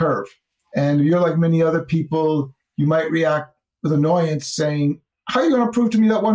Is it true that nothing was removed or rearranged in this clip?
no; 2 cuts; at 2.6 s, 5.1 s

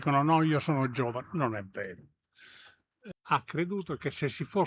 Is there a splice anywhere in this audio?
yes; 1 cut; at 3.1 s

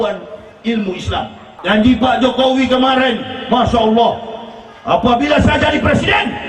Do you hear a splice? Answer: yes; 1 cut; at 1.4 s

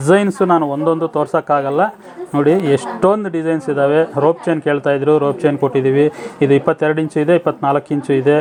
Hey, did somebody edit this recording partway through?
no; 0 cuts

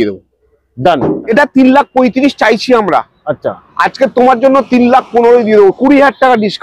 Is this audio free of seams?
no; 1 cut; at 1.3 s

